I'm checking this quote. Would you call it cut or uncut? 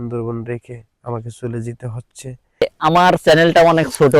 cut